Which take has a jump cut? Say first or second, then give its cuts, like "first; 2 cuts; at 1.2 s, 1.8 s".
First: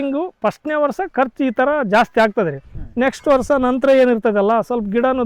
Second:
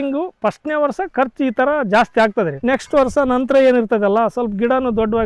second; 1 cut; at 2.5 s